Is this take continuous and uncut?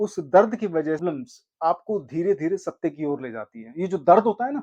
no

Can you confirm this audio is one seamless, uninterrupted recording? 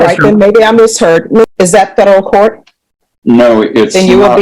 no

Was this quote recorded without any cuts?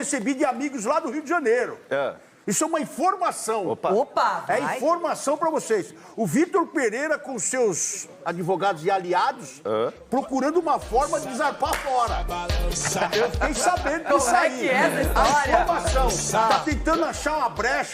yes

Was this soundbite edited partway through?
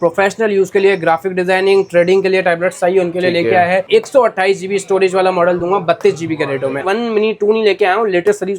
yes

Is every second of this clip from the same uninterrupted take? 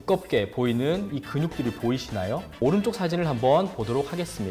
yes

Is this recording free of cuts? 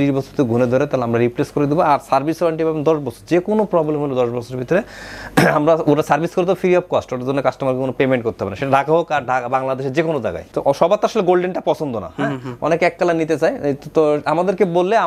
yes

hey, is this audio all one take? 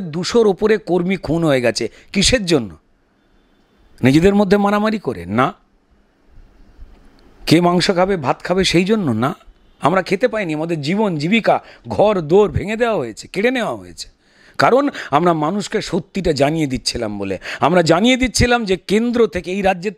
yes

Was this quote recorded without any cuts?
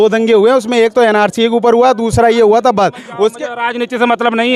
yes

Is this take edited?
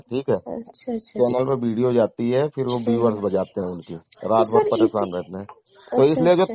yes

